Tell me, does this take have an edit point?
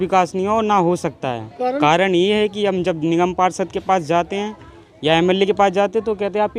no; 0 cuts

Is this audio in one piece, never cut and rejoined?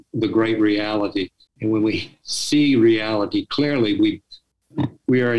no; 1 cut; at 1.4 s

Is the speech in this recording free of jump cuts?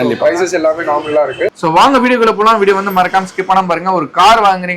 no; 1 cut; at 1.6 s

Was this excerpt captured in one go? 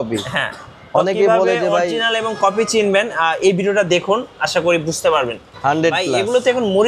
no; 1 cut; at 5.4 s

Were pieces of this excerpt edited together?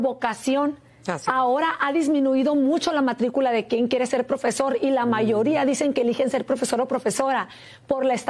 no; 0 cuts

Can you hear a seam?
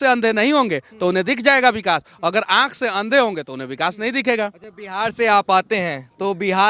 no; 0 cuts

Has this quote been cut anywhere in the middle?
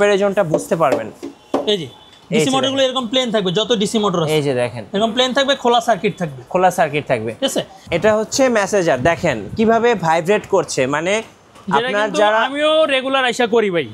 yes; 1 cut; at 7.8 s

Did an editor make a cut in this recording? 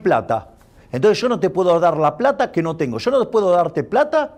no; 0 cuts

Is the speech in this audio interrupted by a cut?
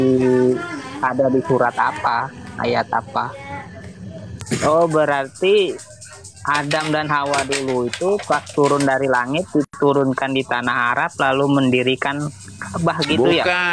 yes; 1 cut; at 4.3 s

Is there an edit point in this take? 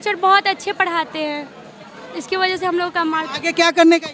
no; 0 cuts

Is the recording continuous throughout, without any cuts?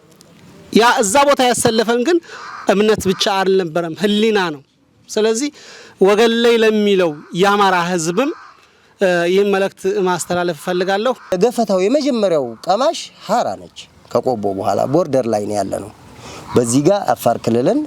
no; 1 cut; at 11.3 s

